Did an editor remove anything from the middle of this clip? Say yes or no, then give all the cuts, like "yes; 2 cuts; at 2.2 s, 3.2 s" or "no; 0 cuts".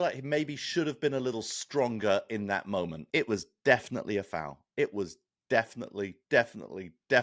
yes; 1 cut; at 3.0 s